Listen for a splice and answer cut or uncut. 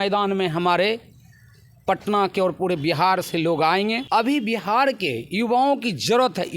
cut